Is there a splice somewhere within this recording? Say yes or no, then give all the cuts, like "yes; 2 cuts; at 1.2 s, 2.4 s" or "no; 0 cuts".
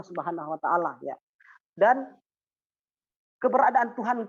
no; 0 cuts